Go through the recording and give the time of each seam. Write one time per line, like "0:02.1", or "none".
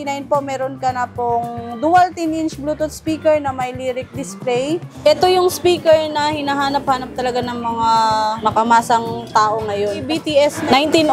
0:04.9
0:08.4
0:10.2